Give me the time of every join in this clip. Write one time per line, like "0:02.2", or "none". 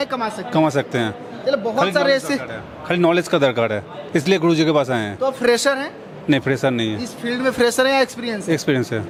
none

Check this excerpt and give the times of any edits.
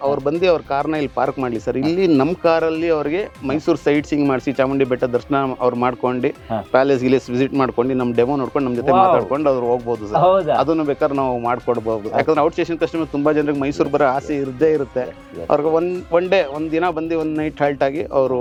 none

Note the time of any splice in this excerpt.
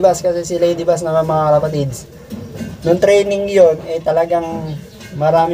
none

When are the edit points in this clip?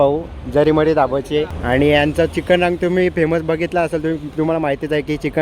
0:01.5

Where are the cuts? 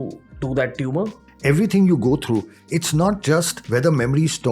0:01.2
0:03.6

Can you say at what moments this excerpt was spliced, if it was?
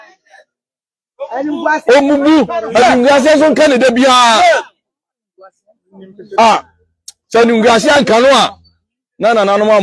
0:06.7

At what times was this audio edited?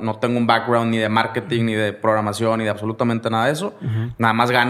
none

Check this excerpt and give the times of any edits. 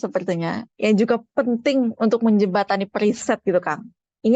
none

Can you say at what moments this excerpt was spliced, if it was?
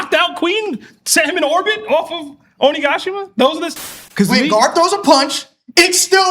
0:04.0

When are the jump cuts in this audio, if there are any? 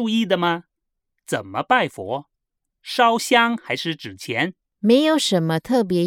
0:04.7

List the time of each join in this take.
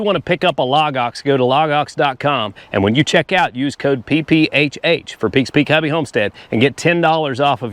none

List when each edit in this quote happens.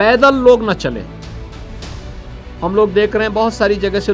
none

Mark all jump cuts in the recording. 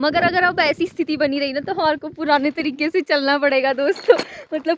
none

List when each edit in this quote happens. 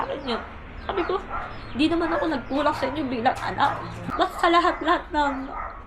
0:03.9

